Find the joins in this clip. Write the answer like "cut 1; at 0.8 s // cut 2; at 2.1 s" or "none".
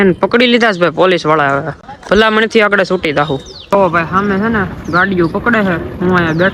none